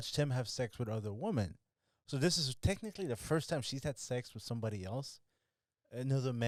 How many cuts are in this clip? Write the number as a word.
zero